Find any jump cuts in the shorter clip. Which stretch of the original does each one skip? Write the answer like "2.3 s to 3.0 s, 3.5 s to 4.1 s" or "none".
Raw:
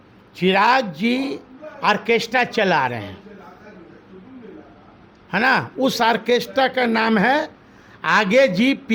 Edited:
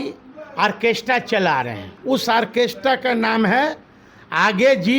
3.2 s to 5.7 s